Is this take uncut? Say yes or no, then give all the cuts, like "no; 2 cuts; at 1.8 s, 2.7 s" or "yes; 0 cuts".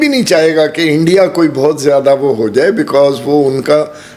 yes; 0 cuts